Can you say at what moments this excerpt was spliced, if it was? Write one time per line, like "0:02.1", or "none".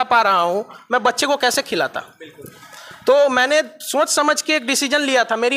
none